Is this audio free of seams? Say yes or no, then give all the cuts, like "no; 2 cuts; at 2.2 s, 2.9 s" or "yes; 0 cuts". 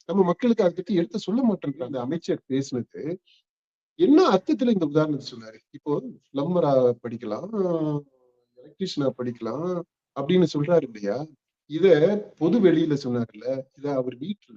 no; 1 cut; at 1.9 s